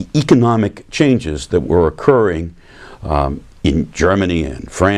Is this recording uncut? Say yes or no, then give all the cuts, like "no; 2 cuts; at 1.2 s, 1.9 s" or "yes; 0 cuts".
yes; 0 cuts